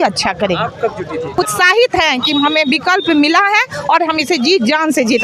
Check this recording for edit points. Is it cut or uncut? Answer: cut